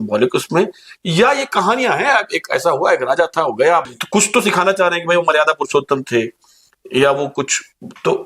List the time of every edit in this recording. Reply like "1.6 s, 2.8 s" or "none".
none

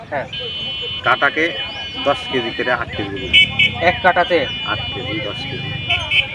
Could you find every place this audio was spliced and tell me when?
none

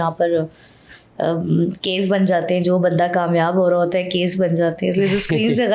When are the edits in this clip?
none

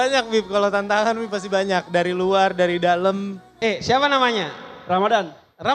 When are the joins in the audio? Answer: 3.5 s

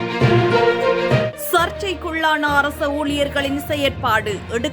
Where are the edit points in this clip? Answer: 1.4 s

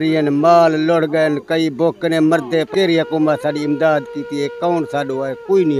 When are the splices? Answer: 2.7 s

